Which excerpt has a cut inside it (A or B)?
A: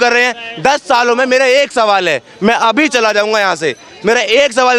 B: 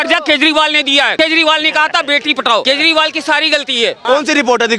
B